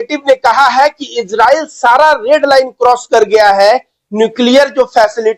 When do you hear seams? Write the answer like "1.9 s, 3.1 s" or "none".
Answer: none